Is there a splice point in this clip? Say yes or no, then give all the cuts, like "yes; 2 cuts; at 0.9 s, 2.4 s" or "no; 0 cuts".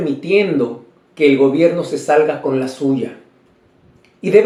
no; 0 cuts